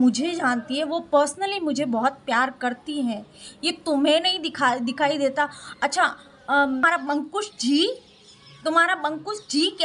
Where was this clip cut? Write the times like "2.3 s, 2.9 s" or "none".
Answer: 6.8 s